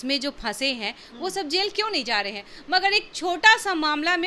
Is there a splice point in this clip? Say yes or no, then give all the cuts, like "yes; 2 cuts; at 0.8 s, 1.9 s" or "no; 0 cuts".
no; 0 cuts